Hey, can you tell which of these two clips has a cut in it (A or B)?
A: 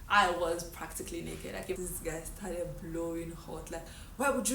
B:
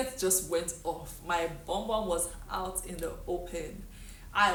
A